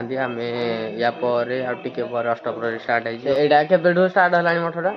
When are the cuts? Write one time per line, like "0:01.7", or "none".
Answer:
0:03.2